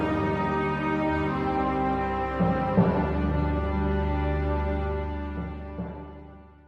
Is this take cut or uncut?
uncut